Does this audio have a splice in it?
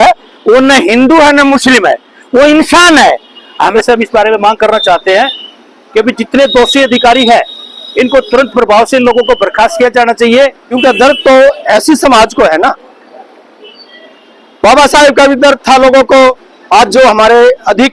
yes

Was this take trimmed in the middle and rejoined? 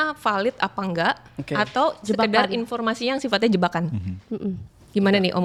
no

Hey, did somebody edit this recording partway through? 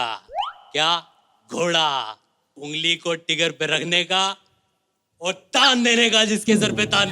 yes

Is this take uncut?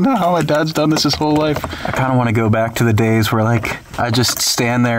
no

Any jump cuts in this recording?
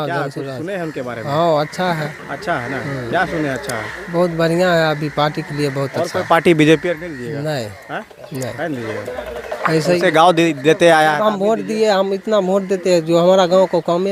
no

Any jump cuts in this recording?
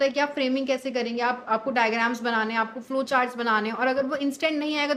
no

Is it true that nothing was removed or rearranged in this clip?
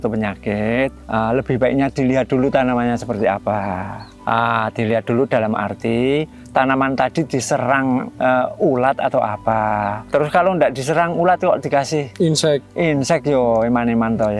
yes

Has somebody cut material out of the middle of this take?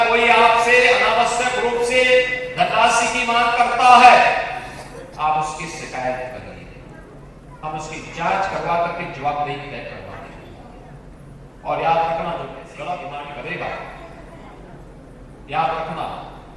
yes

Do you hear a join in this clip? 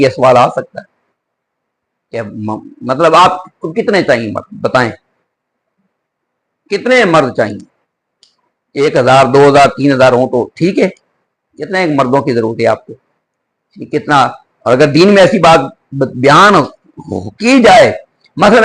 no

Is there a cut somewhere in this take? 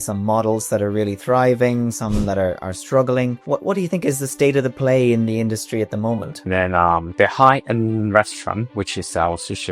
yes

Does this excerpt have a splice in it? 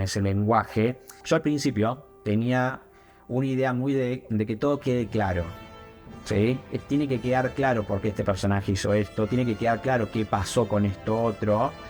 yes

